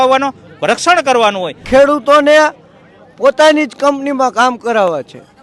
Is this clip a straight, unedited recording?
no; 1 cut; at 1.5 s

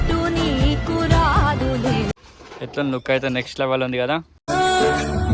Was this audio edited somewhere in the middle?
yes; 1 cut; at 2.1 s

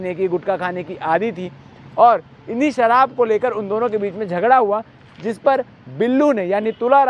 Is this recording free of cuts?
yes; 0 cuts

